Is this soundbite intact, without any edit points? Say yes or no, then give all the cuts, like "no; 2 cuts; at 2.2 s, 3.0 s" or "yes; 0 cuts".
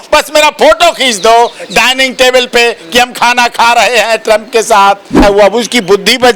no; 1 cut; at 5.2 s